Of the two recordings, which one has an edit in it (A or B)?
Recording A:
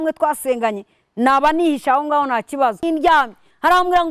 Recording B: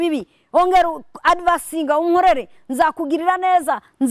A